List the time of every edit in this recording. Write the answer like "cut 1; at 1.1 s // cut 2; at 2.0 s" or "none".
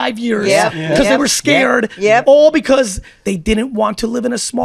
cut 1; at 3.1 s